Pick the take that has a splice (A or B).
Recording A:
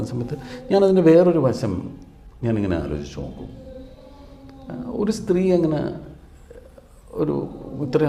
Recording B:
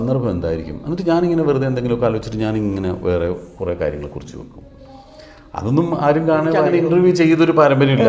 B